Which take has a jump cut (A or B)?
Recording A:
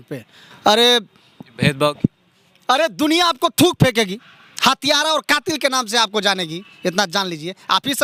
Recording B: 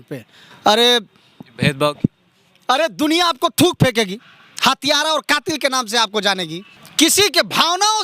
B